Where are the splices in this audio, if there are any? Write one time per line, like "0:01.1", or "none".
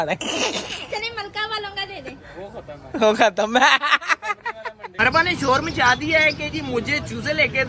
0:05.0